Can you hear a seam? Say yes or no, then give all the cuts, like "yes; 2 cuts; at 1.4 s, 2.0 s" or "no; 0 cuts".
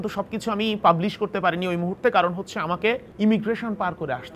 yes; 1 cut; at 3.1 s